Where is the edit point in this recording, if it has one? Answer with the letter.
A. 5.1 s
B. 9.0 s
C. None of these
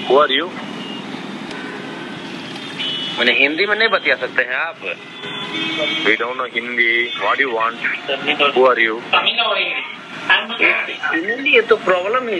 C